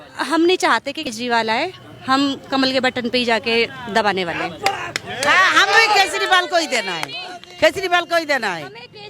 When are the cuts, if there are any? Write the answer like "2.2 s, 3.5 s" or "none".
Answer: 1.1 s